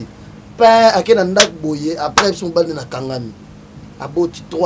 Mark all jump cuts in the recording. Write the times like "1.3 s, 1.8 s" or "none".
none